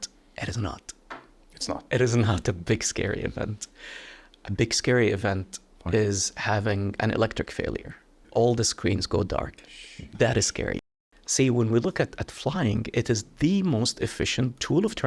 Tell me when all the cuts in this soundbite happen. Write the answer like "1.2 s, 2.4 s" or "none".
8.2 s, 10.8 s